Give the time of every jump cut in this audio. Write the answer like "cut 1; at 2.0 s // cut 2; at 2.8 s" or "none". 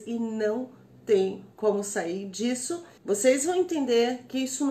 cut 1; at 2.9 s